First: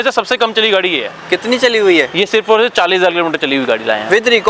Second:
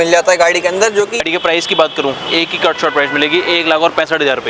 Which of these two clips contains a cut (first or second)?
second